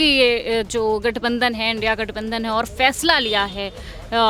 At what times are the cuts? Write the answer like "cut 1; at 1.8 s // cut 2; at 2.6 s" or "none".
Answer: none